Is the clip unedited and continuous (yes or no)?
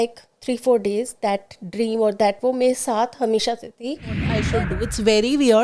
no